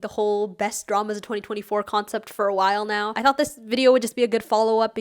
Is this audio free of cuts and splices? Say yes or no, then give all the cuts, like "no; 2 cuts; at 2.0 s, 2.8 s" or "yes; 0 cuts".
no; 1 cut; at 3.2 s